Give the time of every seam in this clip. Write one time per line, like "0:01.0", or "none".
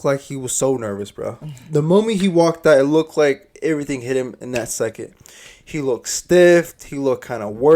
none